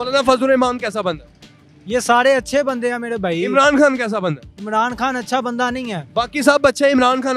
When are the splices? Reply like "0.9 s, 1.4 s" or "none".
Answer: none